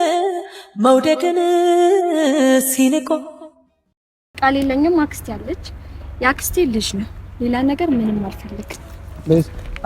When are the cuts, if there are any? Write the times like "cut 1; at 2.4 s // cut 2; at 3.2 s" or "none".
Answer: cut 1; at 3.9 s